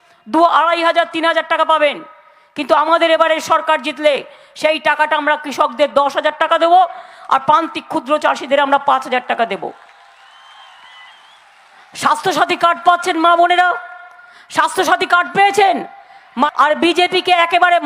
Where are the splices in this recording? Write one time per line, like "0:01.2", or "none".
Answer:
0:16.5